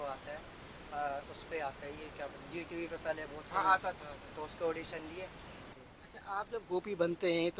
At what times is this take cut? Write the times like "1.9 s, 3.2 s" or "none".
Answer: 5.7 s